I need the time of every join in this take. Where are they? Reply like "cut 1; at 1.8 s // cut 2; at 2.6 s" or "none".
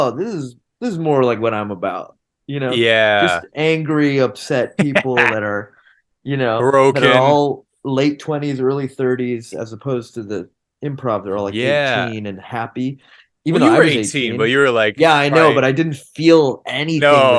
none